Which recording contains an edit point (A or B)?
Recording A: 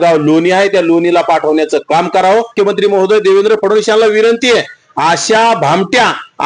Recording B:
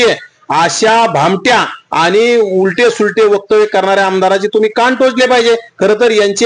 A